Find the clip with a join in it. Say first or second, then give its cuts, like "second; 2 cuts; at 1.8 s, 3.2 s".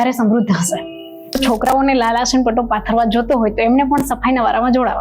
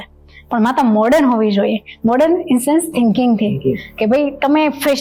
first; 1 cut; at 1.4 s